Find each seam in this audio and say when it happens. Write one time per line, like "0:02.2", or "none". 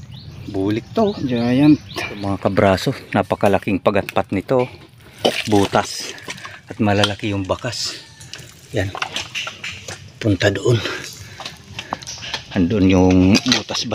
0:02.2